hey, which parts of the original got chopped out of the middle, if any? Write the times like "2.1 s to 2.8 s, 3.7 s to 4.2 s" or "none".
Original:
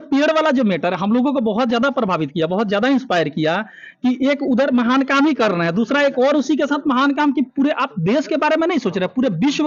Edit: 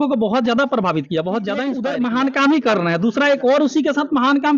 2.9 s to 4.4 s